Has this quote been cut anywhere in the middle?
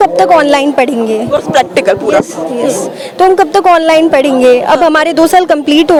no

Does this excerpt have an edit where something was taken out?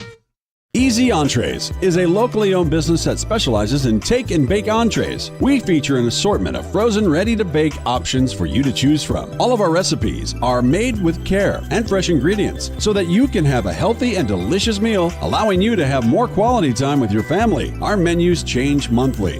yes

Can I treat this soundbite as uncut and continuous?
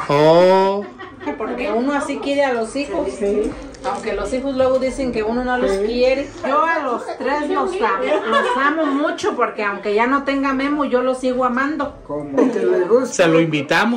no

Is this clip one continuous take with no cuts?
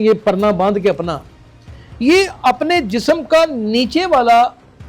yes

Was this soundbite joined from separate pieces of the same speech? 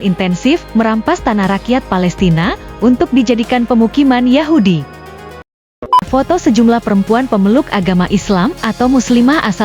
yes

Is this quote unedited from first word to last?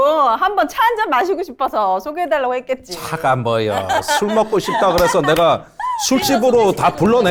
yes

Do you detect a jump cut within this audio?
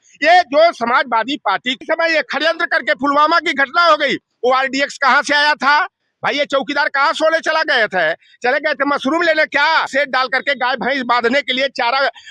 yes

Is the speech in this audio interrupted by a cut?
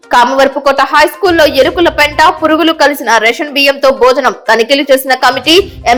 no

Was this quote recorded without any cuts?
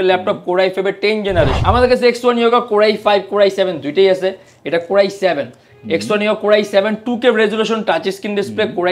no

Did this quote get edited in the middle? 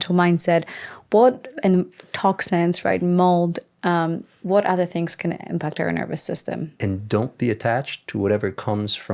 yes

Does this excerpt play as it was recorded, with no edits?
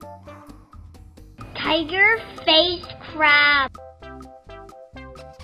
no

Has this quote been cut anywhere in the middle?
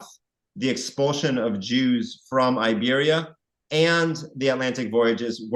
no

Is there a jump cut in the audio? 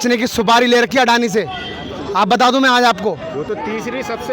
no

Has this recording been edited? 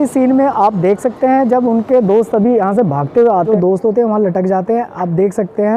yes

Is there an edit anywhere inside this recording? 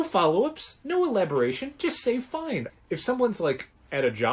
yes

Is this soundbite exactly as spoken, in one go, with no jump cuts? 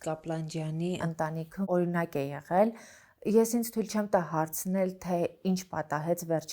no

